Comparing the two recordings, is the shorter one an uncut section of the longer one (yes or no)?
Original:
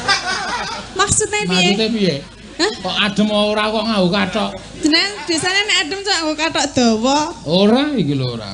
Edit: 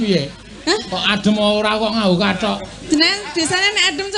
yes